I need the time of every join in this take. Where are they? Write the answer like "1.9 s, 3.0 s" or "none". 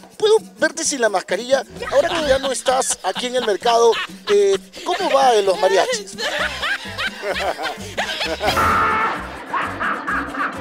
none